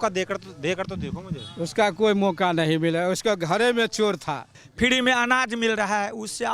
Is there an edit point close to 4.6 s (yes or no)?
yes